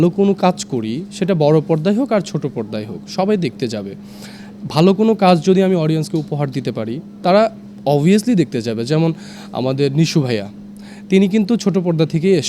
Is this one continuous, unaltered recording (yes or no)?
yes